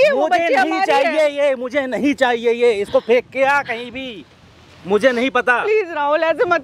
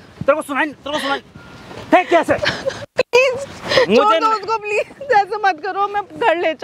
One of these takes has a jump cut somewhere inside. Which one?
second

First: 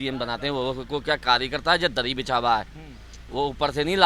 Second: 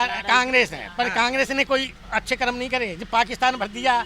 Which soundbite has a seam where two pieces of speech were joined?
second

